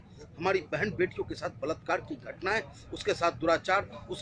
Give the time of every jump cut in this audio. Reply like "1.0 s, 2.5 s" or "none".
none